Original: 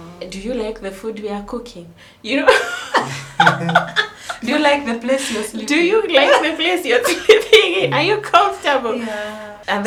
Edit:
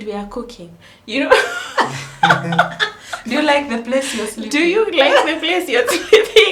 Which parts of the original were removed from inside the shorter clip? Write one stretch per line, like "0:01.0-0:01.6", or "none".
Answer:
none